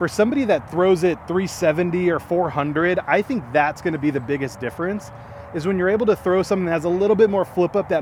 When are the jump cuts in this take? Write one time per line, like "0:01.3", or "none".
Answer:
none